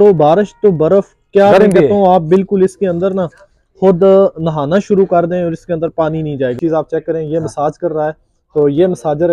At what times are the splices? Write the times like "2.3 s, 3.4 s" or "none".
6.6 s